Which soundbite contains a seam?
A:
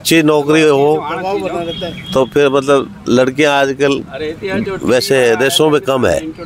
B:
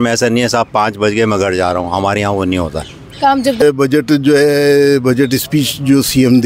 B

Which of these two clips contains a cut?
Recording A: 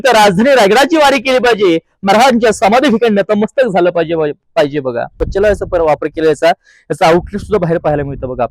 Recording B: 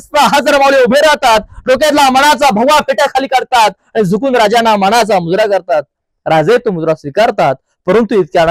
A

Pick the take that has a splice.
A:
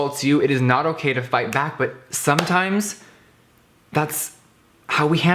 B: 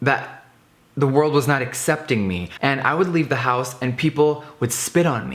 B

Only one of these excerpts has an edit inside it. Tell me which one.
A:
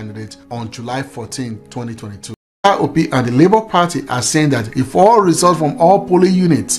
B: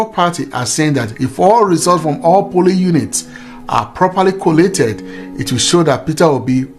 A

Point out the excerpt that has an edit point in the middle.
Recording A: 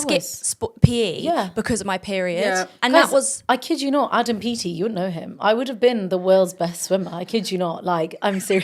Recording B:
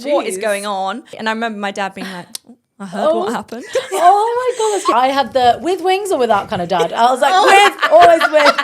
B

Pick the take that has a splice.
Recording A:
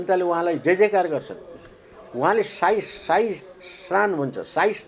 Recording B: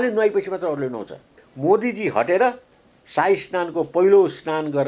B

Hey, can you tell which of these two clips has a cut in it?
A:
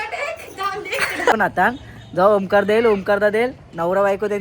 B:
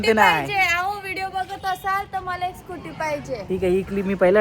A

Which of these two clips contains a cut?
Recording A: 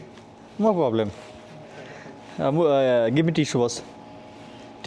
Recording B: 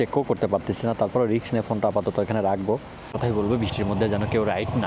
B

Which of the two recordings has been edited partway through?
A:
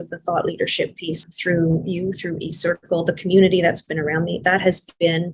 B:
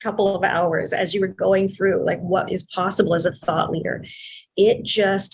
A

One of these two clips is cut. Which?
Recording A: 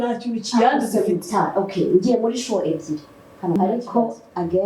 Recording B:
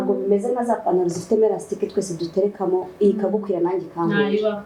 A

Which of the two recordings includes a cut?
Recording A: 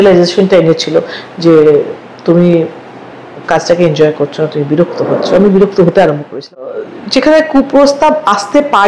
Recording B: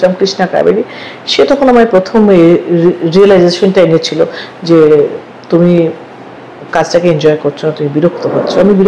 A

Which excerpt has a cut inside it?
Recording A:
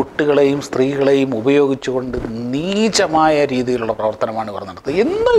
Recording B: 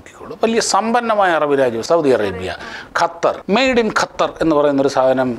B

